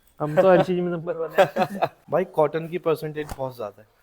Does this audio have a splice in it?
yes; 1 cut; at 2.0 s

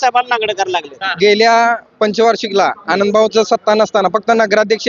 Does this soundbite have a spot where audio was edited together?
yes; 1 cut; at 1.0 s

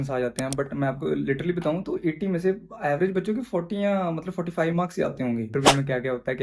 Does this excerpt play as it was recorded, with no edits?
no; 1 cut; at 5.5 s

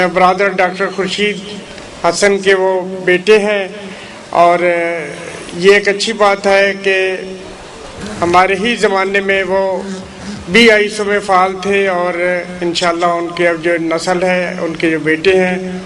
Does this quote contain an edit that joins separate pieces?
no; 0 cuts

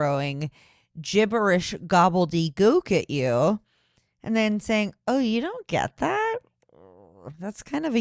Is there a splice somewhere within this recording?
no; 0 cuts

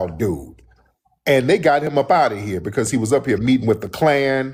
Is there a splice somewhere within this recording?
no; 0 cuts

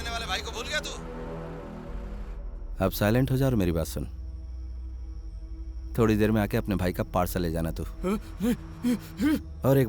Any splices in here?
no; 0 cuts

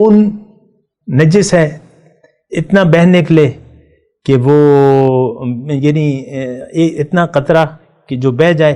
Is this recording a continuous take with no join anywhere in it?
yes; 0 cuts

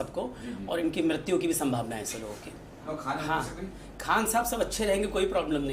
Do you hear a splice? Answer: yes; 1 cut; at 2.8 s

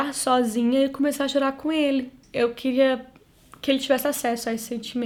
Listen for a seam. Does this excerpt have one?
no; 0 cuts

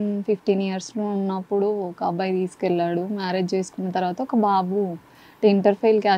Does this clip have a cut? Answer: no; 0 cuts

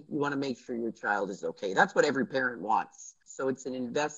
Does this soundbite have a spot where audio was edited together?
no; 0 cuts

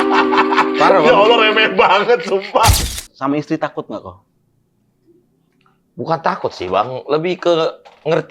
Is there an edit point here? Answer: yes; 1 cut; at 2.8 s

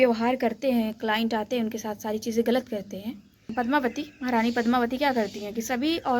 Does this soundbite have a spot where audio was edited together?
yes; 1 cut; at 3.5 s

